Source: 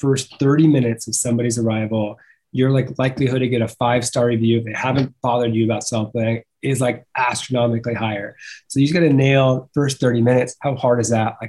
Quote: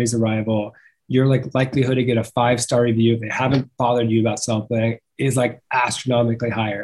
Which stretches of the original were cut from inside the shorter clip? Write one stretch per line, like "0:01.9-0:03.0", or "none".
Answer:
none

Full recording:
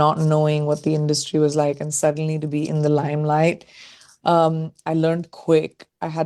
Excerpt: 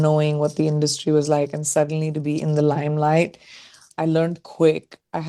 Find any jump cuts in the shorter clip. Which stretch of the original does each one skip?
0:04.1-0:04.7

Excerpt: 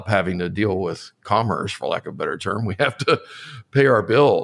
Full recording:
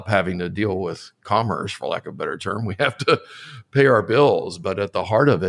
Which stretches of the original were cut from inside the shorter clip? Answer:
none

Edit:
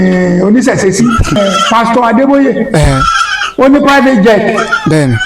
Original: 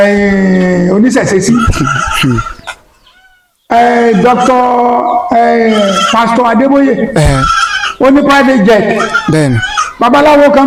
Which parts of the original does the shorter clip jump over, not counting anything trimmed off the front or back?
0:01.8-0:05.8

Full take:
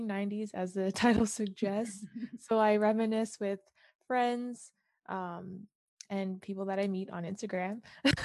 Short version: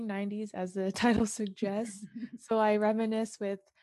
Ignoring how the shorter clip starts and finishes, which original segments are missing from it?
none

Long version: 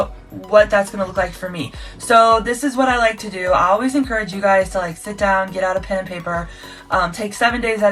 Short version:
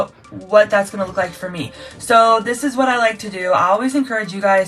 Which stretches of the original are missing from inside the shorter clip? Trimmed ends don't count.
none

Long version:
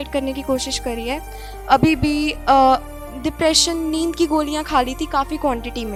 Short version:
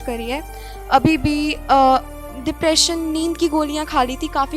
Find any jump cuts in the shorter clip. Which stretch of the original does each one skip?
none

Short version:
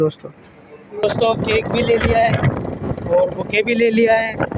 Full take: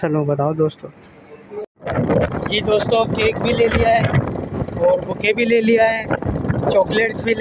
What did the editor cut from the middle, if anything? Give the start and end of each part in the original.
0:01.6-0:02.7

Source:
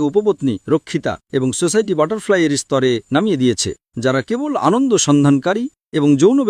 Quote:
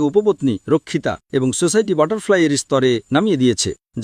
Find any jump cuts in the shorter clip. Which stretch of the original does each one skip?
none

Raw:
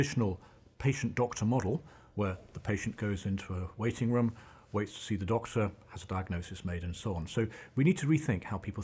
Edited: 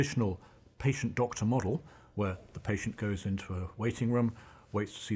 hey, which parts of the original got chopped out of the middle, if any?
none

